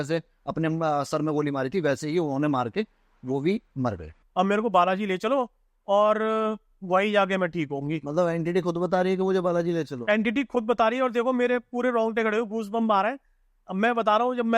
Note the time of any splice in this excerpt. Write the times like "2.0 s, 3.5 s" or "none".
4.1 s